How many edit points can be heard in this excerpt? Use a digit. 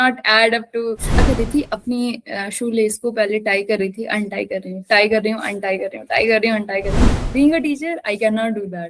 2